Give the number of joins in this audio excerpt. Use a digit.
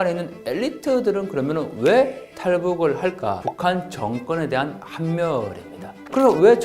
1